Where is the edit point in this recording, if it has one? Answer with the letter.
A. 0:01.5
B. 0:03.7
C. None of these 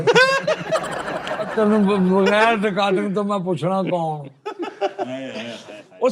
C